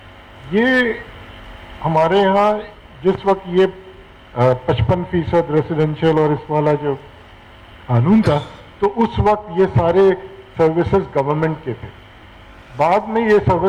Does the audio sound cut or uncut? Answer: uncut